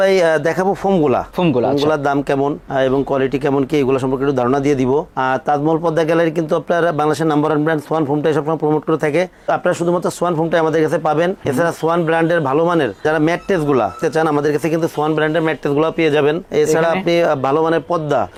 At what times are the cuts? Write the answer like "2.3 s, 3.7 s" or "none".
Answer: none